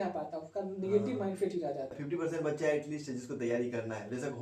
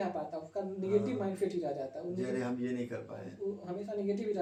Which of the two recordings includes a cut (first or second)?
first